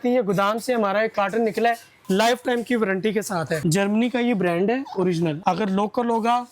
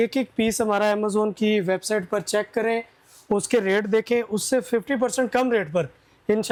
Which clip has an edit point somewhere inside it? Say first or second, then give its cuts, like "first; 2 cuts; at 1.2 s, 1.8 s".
first; 3 cuts; at 1.9 s, 3.6 s, 5.4 s